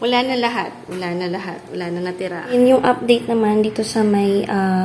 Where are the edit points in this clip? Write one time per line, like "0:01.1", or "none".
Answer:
0:02.5